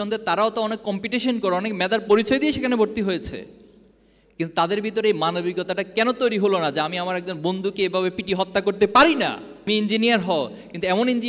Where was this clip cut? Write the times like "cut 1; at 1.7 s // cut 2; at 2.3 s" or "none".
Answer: cut 1; at 9.7 s